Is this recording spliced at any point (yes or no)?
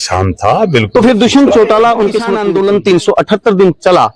yes